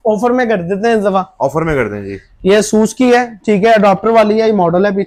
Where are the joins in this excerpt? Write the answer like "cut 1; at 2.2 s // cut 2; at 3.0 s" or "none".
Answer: none